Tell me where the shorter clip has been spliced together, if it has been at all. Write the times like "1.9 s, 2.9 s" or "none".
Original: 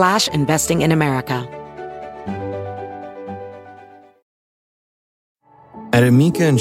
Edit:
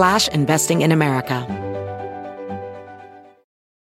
1.4 s